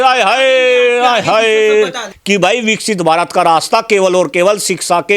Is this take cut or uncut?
cut